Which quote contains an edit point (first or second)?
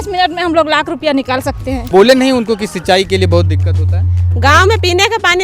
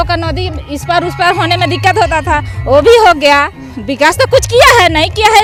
first